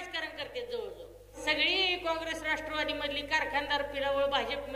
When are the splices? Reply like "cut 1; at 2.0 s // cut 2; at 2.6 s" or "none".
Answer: cut 1; at 1.4 s